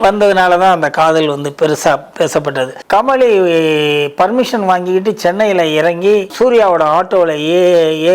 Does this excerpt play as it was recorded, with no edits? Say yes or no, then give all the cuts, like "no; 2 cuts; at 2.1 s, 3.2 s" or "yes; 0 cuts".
no; 2 cuts; at 2.8 s, 6.3 s